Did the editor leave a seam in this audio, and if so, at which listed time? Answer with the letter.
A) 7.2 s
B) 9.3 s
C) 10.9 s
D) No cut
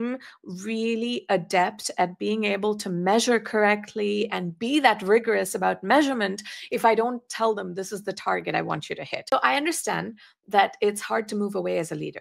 B